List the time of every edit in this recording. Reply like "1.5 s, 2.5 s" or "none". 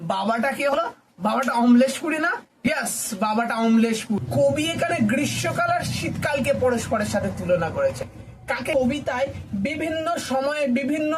4.2 s, 8.7 s